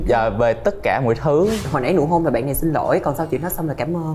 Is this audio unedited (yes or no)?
no